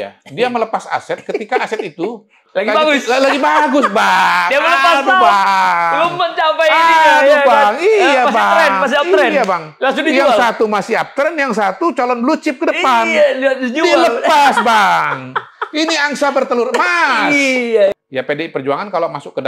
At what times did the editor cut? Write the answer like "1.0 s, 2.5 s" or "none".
17.9 s